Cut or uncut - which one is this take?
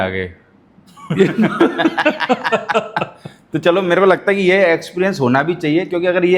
uncut